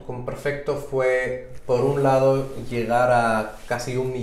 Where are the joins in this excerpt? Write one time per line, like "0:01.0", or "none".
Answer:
none